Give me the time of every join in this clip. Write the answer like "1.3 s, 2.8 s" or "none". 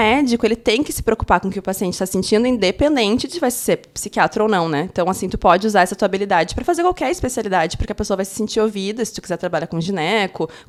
none